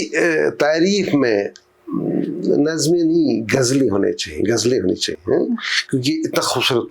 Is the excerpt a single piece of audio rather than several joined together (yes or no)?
yes